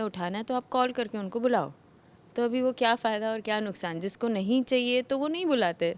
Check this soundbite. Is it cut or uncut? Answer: uncut